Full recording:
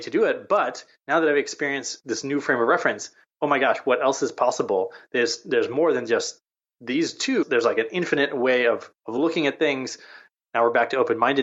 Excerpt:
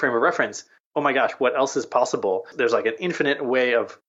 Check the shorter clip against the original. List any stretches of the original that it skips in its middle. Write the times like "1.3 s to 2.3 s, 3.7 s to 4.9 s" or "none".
5.0 s to 7.5 s